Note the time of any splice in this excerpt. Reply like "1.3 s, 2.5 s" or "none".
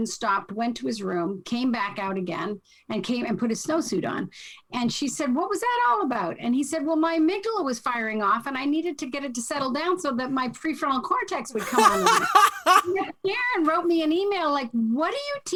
none